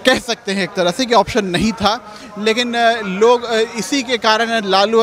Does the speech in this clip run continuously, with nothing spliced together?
yes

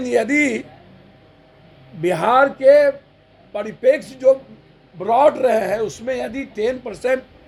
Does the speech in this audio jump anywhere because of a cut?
no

